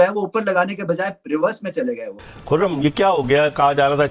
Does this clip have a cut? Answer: yes; 1 cut; at 2.3 s

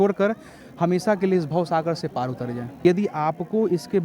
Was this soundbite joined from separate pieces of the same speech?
yes; 1 cut; at 2.8 s

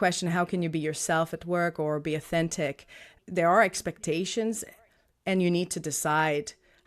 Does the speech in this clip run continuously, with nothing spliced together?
no; 1 cut; at 3.1 s

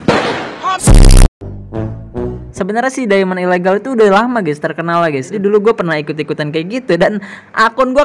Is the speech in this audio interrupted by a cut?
yes; 2 cuts; at 2.4 s, 5.3 s

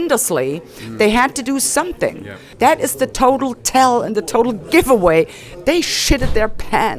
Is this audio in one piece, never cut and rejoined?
no; 1 cut; at 2.4 s

